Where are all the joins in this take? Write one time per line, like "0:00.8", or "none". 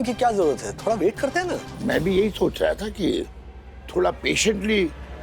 0:01.7